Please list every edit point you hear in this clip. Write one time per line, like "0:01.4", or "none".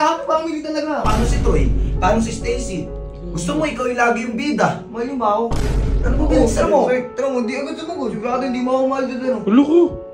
0:01.0
0:04.8